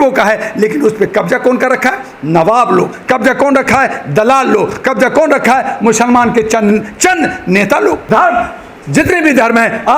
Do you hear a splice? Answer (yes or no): yes